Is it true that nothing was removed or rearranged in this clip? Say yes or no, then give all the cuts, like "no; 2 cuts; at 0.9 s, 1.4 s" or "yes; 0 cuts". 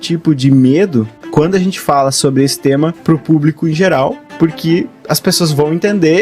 no; 3 cuts; at 1.2 s, 3.0 s, 4.2 s